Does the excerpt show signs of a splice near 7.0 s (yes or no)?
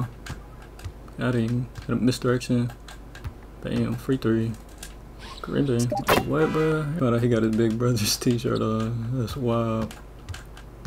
yes